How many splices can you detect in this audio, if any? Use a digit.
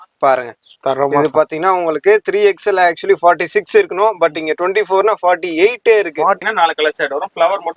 1